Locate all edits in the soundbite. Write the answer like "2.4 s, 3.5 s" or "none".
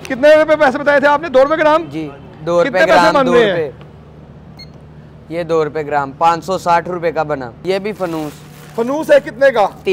7.5 s